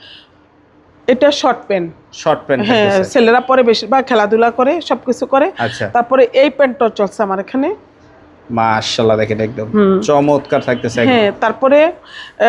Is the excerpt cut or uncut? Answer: uncut